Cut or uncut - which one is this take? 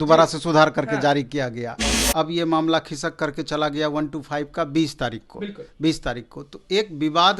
cut